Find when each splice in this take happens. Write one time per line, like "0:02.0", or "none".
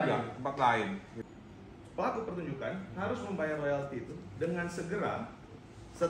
0:01.2